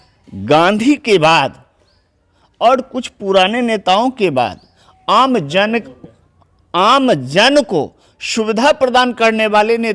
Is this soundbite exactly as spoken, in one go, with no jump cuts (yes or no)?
yes